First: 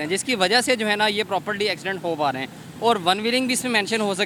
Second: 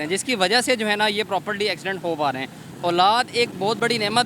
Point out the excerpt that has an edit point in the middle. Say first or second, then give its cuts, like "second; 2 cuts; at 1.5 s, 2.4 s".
second; 1 cut; at 2.6 s